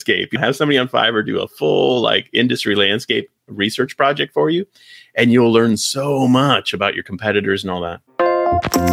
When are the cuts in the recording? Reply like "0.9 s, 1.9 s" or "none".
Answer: 8.0 s